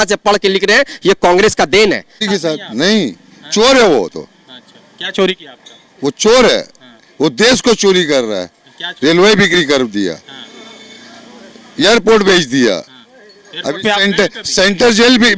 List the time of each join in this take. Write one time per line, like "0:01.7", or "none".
0:02.1

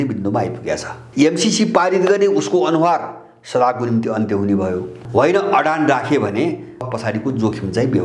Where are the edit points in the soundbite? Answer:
0:00.9
0:05.0
0:06.9

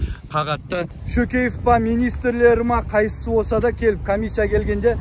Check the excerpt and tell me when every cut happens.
0:01.0

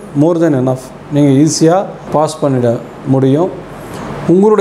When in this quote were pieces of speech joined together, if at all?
0:02.1
0:03.7

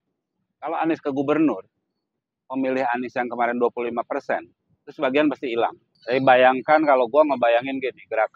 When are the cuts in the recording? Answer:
0:05.9

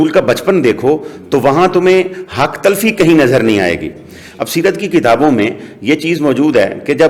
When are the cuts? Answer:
none

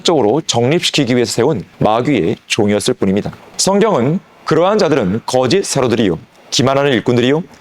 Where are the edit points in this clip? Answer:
0:01.7
0:03.4

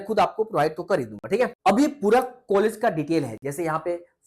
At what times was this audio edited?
none

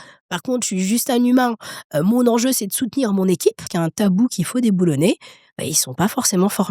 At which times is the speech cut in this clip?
0:03.7

